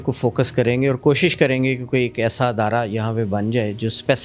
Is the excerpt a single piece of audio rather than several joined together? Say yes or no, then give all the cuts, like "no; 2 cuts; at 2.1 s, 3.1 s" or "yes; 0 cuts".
yes; 0 cuts